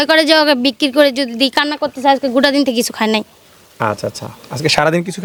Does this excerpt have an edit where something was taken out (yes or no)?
no